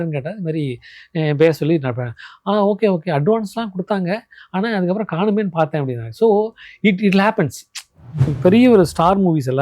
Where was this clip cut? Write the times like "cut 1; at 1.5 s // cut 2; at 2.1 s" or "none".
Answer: cut 1; at 8.3 s